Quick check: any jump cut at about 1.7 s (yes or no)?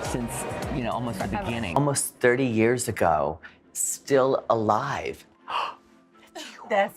yes